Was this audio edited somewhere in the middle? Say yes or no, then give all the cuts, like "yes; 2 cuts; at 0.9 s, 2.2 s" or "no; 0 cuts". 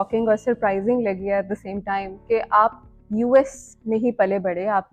no; 0 cuts